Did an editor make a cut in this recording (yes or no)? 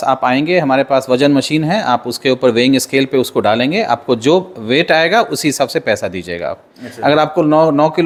no